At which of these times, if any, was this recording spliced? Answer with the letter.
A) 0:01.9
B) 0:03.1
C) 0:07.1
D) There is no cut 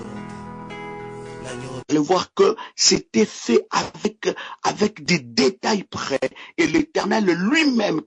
A